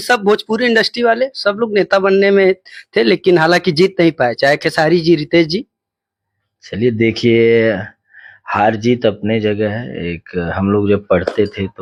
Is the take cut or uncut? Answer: uncut